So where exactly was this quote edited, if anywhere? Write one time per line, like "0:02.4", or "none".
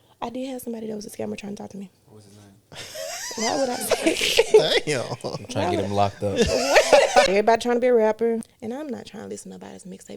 0:07.3
0:08.5